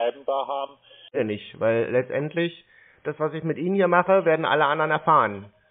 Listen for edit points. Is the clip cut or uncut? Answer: cut